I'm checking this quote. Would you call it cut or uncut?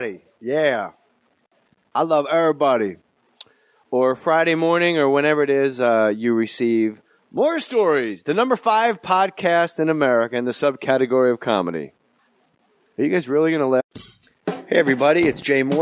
uncut